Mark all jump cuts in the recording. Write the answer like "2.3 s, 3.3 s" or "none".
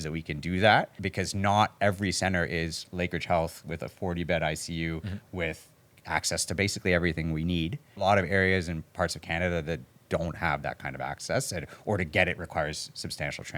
1.0 s, 8.0 s